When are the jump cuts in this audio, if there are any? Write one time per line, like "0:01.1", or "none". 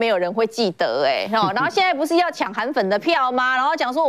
none